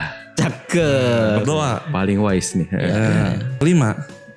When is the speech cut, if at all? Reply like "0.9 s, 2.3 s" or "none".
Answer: none